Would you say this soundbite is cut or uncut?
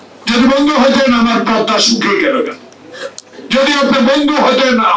uncut